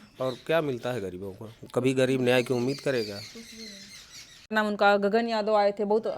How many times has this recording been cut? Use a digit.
1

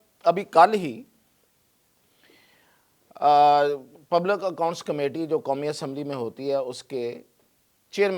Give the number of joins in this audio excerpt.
0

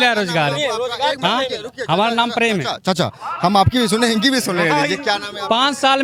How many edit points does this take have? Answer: 0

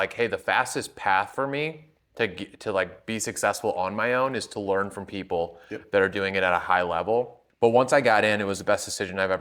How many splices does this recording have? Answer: 1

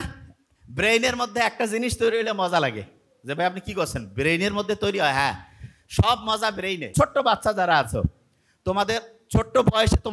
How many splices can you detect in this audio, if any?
1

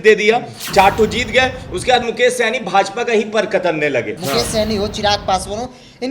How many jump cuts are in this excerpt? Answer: 1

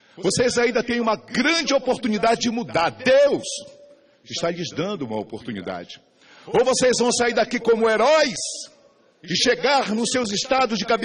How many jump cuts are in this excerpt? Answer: 1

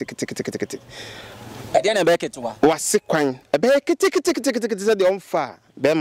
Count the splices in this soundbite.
0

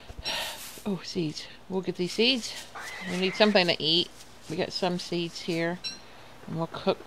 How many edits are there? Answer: 1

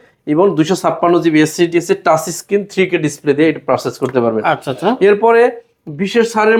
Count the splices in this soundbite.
0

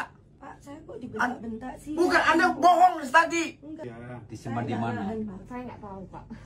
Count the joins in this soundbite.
1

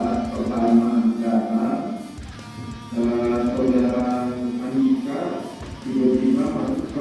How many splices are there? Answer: 0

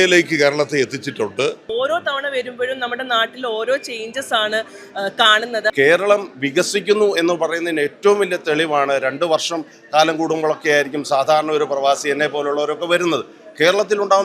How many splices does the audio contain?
2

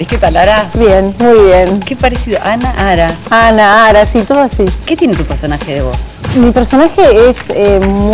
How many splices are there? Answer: 0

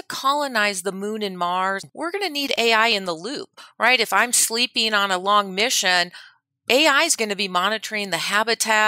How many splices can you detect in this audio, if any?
1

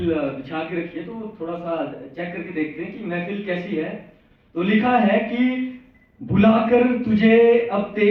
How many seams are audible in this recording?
0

